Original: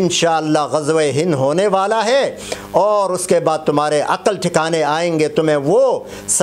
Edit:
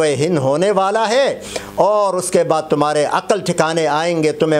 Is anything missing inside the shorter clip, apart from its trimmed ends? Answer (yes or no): no